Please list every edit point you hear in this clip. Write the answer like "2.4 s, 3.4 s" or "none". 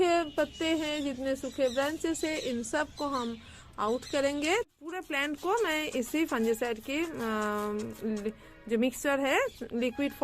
4.9 s